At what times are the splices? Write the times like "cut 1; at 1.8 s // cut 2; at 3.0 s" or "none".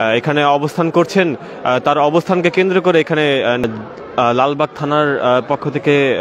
cut 1; at 3.6 s